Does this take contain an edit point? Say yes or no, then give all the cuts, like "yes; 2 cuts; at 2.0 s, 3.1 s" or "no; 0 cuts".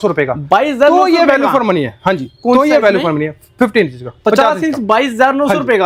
no; 0 cuts